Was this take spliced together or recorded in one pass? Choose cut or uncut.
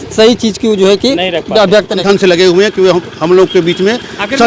cut